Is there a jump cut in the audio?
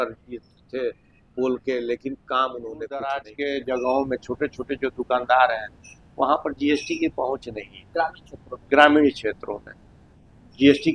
yes; 1 cut; at 3.2 s

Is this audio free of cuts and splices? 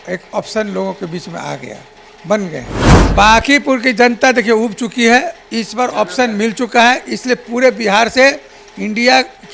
no; 1 cut; at 3.0 s

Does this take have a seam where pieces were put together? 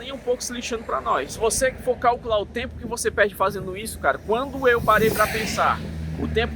yes; 1 cut; at 1.3 s

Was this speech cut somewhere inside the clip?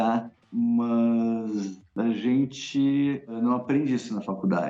yes; 1 cut; at 3.3 s

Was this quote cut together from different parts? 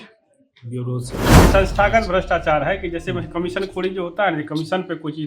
yes; 1 cut; at 1.3 s

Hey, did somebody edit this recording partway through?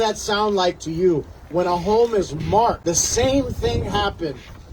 yes; 1 cut; at 2.8 s

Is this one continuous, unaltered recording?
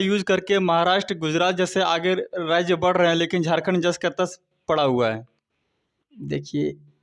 yes; 0 cuts

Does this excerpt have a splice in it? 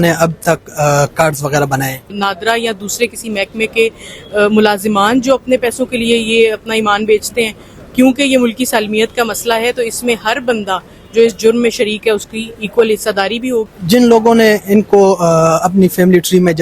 yes; 2 cuts; at 2.2 s, 13.7 s

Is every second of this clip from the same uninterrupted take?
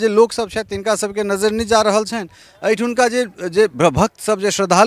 yes; 0 cuts

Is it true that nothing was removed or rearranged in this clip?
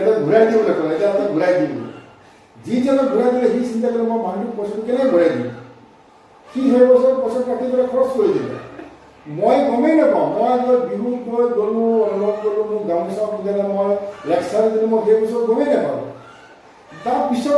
yes; 0 cuts

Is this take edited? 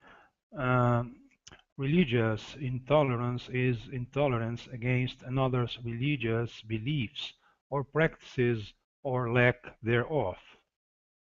yes; 1 cut; at 3.3 s

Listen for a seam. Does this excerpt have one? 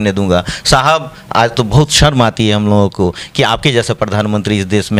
no; 0 cuts

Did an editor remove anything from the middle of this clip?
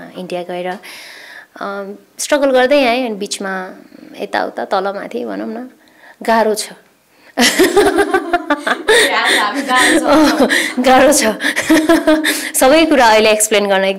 no; 0 cuts

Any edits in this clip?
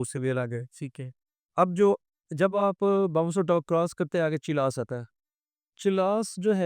no; 0 cuts

